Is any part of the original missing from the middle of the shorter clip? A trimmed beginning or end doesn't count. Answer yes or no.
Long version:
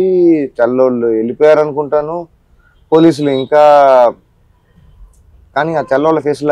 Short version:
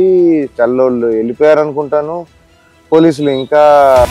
no